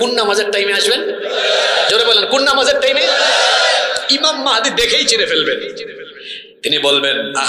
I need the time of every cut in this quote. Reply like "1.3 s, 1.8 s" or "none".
none